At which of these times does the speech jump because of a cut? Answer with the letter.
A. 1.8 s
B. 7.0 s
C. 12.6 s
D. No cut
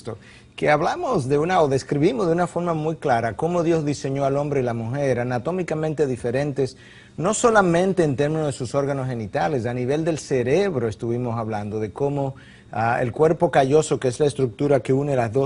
C